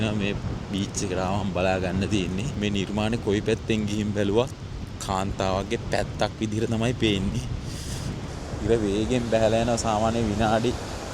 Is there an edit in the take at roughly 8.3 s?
yes; 2 cuts; at 2.5 s, 8.3 s

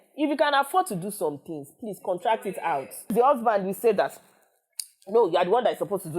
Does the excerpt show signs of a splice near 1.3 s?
no; 1 cut; at 3.1 s

